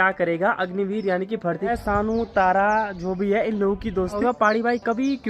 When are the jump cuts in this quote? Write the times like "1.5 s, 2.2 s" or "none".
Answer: 1.7 s, 4.2 s